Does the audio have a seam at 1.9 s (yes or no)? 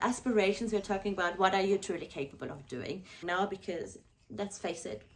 no